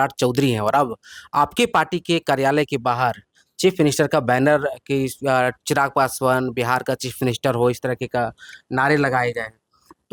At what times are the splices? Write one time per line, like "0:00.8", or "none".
none